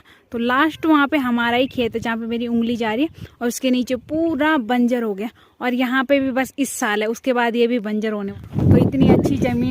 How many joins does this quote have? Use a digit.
1